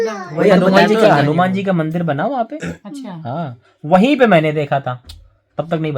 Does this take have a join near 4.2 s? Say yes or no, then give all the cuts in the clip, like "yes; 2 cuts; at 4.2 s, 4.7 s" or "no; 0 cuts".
no; 0 cuts